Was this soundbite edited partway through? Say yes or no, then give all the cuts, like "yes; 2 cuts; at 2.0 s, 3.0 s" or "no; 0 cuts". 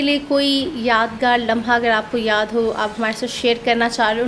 no; 0 cuts